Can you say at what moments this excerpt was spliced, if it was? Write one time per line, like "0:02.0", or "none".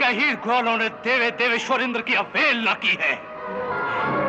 none